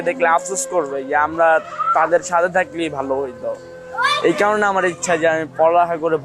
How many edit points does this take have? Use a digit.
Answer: 0